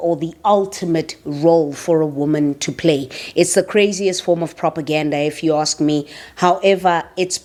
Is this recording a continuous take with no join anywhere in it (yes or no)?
yes